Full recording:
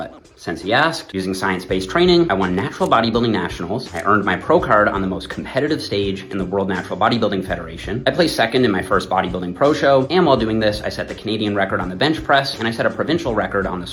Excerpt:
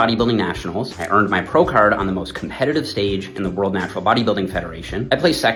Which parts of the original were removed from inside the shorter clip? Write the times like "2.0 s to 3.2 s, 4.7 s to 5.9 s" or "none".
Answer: none